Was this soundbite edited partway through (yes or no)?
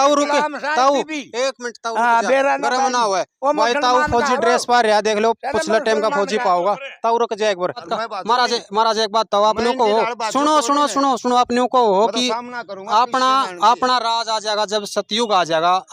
yes